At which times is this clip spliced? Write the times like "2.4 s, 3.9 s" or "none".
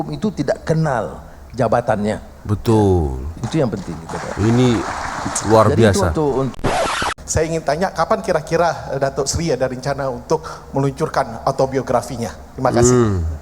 6.7 s